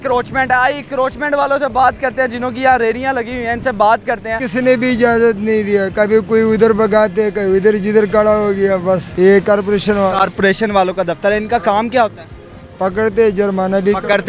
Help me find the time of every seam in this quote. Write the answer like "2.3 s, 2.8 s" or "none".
4.4 s, 9.1 s